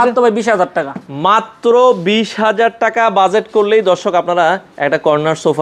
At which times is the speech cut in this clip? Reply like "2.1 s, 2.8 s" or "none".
none